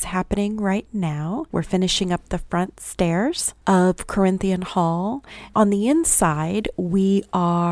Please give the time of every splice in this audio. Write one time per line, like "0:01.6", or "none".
0:01.5
0:03.5
0:05.3